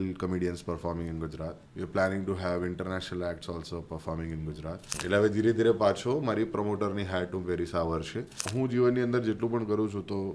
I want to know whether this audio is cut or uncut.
cut